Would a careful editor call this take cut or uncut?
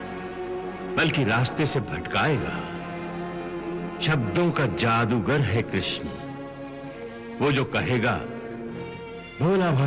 uncut